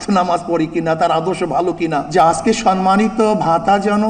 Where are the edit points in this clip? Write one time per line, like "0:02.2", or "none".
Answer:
0:02.1